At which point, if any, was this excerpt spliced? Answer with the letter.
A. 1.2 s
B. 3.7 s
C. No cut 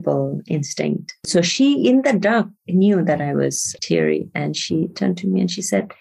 B